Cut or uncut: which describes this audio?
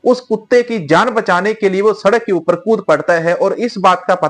uncut